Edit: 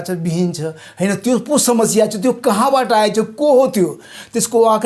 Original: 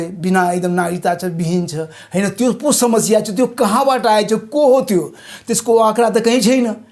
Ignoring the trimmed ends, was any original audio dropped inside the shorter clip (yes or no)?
no